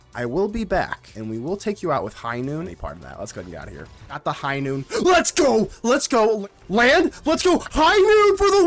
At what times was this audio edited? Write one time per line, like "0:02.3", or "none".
0:01.1
0:02.7
0:04.2
0:06.4